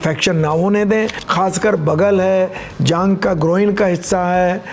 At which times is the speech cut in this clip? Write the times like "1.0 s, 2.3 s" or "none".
1.2 s

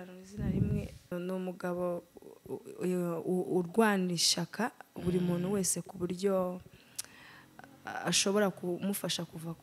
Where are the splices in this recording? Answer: 1.1 s

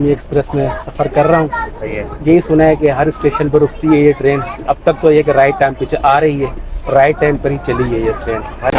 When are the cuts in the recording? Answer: none

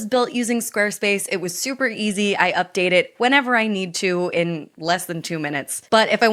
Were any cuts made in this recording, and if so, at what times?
none

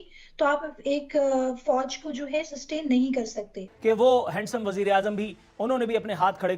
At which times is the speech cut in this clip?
3.6 s

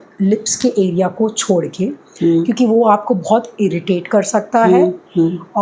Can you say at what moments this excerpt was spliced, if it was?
none

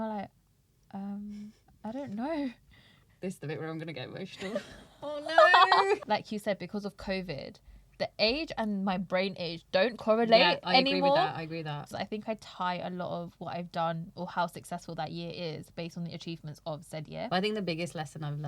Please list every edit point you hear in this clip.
2.9 s, 6.0 s, 11.8 s, 17.3 s

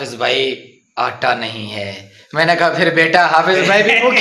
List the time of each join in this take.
none

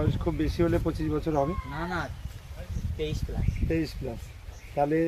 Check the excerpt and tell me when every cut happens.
none

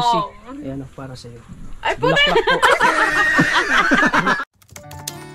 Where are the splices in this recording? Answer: 4.4 s

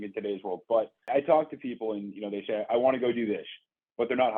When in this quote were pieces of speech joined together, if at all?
1.1 s

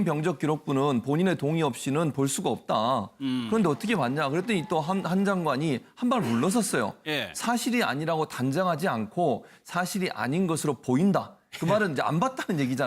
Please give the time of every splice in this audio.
1.2 s

